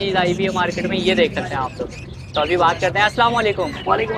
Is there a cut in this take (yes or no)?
no